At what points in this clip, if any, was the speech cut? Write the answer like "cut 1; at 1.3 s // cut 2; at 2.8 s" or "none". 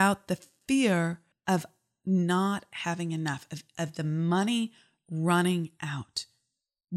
cut 1; at 1.3 s